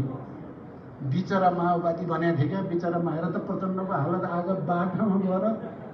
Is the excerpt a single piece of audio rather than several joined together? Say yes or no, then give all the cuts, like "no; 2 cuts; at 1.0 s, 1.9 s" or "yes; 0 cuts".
yes; 0 cuts